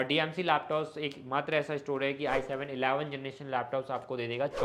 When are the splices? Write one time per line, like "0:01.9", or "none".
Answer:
none